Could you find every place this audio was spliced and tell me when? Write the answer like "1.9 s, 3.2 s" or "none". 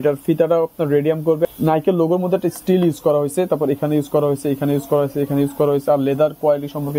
1.5 s